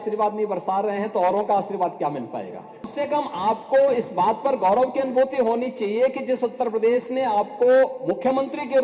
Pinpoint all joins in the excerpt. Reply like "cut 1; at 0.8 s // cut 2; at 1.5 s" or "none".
cut 1; at 2.9 s